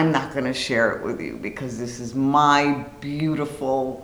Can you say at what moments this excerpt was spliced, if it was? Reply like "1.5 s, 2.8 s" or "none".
none